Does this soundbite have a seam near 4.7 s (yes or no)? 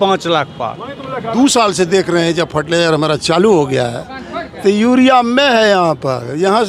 no